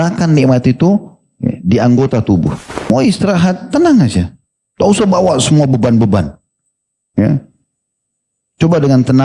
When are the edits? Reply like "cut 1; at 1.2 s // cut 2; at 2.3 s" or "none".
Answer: cut 1; at 2.7 s